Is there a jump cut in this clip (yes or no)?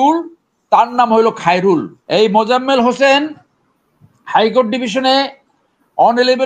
yes